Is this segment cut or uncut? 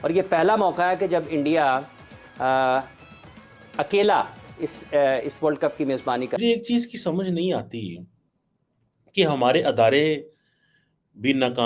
cut